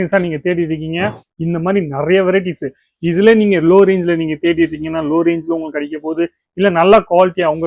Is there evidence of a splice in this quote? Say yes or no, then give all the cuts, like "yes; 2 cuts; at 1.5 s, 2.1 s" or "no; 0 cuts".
yes; 1 cut; at 1.3 s